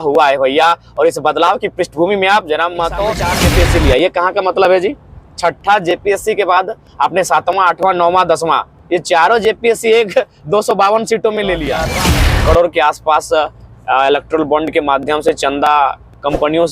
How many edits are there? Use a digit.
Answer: 2